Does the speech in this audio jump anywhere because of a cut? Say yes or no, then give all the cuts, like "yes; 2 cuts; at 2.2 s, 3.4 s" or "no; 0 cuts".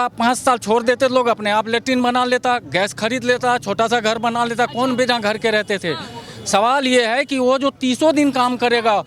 no; 0 cuts